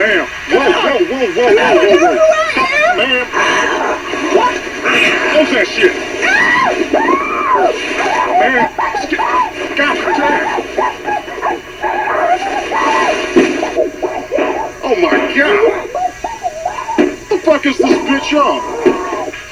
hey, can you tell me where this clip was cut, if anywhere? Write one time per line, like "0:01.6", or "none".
none